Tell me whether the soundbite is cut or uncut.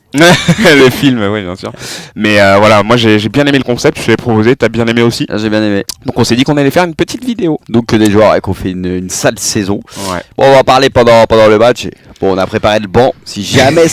cut